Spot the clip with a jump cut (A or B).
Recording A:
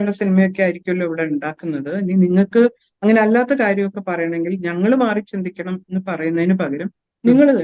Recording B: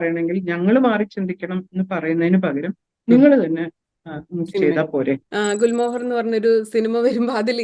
B